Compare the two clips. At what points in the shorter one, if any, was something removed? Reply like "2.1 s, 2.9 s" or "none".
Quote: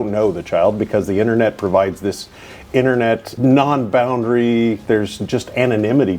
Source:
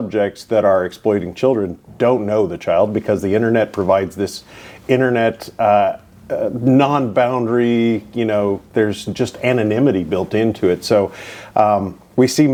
3.3 s, 4.8 s